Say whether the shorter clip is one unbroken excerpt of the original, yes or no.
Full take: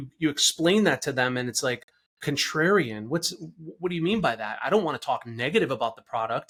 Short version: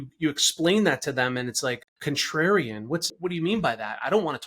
no